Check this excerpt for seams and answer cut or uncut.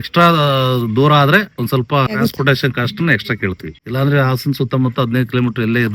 cut